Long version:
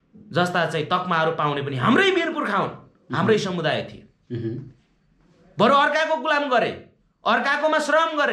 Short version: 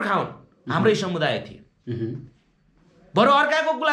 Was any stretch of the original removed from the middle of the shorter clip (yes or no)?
no